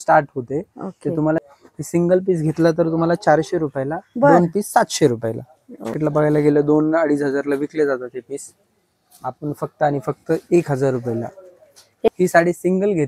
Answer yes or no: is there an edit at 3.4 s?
no